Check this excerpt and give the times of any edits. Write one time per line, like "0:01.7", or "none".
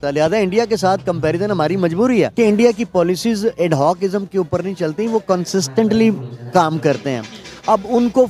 0:02.3